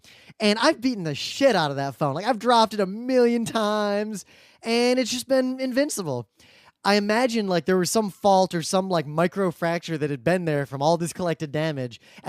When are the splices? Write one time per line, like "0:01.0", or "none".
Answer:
0:01.2